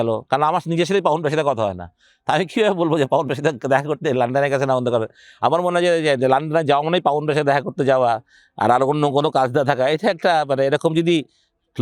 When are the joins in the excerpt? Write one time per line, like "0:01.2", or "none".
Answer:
none